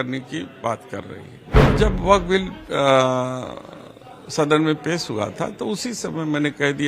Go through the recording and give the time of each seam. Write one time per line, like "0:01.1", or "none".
0:01.7